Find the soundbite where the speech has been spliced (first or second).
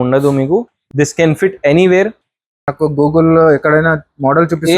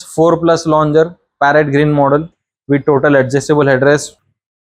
first